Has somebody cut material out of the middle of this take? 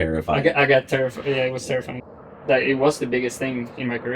yes; 1 cut; at 2.4 s

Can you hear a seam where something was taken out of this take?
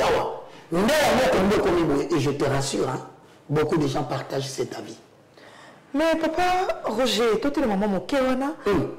no; 0 cuts

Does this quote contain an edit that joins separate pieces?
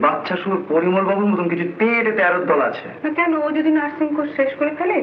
no; 0 cuts

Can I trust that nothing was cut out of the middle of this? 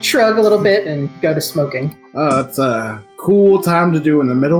yes; 0 cuts

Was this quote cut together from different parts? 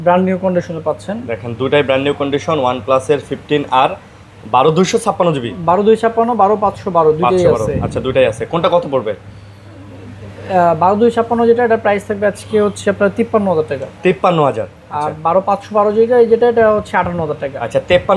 no; 0 cuts

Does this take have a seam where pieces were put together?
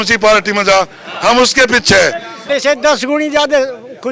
yes; 1 cut; at 2.3 s

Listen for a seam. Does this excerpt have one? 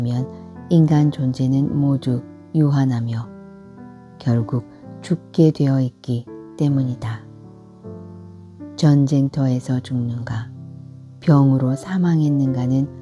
yes; 2 cuts; at 7.1 s, 8.8 s

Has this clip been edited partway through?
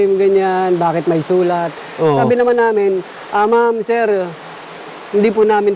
no; 0 cuts

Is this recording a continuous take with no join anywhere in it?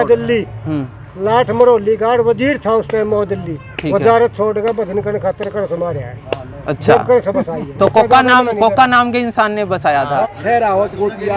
no; 1 cut; at 10.1 s

